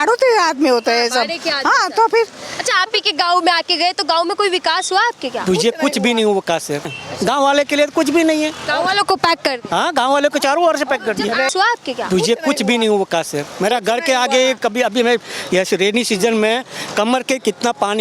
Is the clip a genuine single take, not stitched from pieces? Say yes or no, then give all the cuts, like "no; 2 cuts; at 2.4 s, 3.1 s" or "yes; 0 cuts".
no; 2 cuts; at 6.9 s, 11.5 s